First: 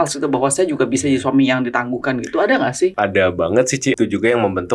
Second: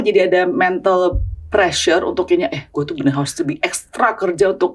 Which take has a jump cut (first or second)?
first